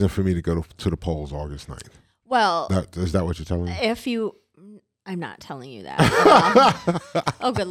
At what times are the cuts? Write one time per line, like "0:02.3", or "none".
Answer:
none